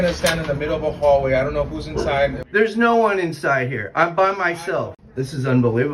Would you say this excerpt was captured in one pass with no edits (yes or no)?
no